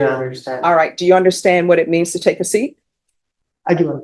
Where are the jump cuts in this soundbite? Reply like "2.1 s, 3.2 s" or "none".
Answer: none